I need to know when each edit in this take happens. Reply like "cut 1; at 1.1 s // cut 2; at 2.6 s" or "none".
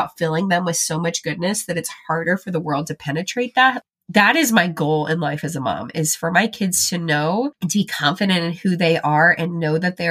cut 1; at 7.6 s